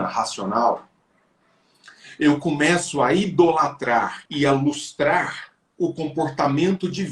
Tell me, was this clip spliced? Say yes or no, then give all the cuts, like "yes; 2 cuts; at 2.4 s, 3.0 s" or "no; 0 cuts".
yes; 1 cut; at 4.2 s